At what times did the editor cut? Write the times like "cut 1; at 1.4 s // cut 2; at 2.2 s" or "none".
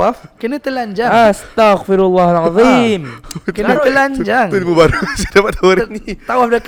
none